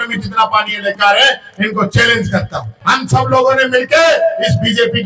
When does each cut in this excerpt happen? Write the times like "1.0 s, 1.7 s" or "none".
2.7 s